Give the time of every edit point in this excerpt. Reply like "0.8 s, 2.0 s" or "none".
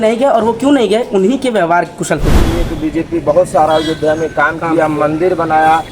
2.3 s